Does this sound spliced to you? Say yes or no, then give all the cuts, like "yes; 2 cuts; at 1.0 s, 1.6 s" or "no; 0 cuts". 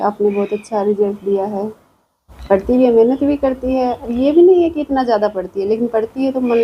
no; 0 cuts